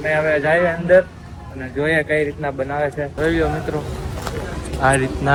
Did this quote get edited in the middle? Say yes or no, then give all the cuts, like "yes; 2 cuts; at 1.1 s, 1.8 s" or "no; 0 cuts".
no; 0 cuts